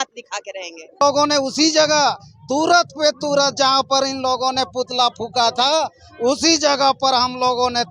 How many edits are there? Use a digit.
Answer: 1